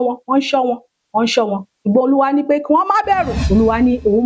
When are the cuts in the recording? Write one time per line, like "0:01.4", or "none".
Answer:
0:03.3